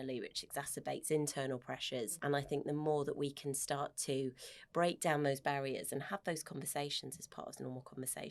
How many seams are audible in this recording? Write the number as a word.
one